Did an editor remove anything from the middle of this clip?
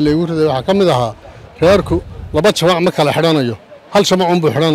no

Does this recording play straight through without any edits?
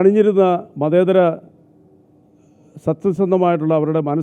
yes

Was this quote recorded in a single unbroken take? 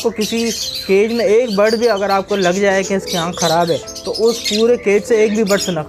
yes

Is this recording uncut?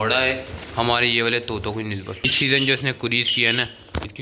no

